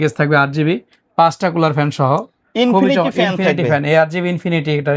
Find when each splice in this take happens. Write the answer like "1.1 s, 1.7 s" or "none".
none